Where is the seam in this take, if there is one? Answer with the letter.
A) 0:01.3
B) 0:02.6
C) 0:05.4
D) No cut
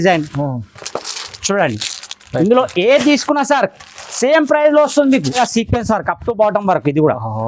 C